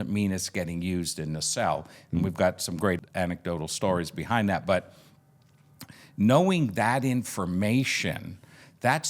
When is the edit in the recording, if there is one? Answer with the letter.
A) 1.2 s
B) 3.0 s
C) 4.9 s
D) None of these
B